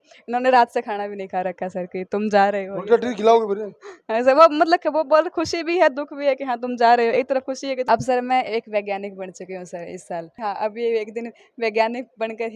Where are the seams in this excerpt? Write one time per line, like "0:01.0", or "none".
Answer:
0:07.8
0:10.4